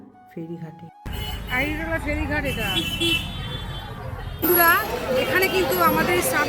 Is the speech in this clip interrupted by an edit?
yes; 1 cut; at 4.4 s

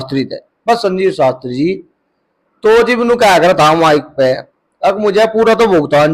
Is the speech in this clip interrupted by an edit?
no; 0 cuts

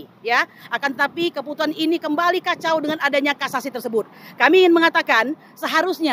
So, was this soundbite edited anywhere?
no; 0 cuts

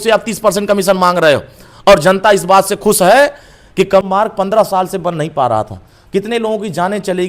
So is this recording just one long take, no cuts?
no; 1 cut; at 4.1 s

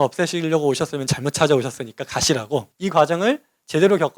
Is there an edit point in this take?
yes; 1 cut; at 2.7 s

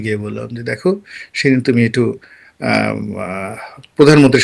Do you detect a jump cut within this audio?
no; 0 cuts

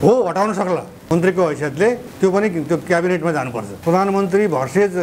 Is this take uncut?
no; 3 cuts; at 1.0 s, 2.1 s, 3.7 s

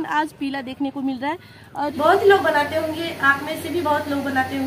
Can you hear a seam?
yes; 1 cut; at 1.9 s

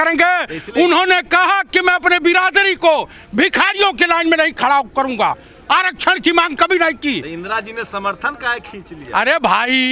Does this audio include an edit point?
no; 0 cuts

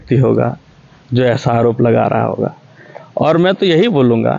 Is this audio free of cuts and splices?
yes; 0 cuts

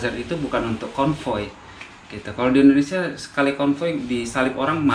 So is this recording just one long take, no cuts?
yes; 0 cuts

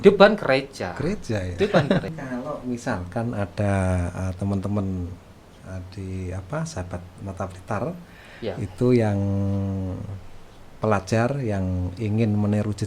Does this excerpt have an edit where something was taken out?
yes; 1 cut; at 2.1 s

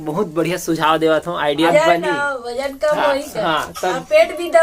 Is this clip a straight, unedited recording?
no; 1 cut; at 1.7 s

